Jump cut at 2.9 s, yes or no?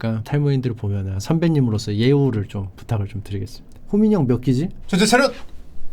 no